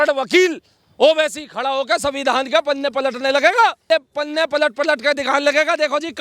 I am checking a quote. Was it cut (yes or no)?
yes